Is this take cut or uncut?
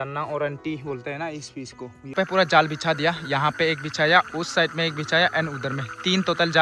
cut